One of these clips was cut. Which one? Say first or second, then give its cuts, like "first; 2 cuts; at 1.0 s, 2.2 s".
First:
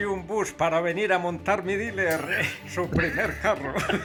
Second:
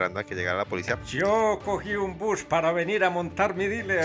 second; 1 cut; at 1.0 s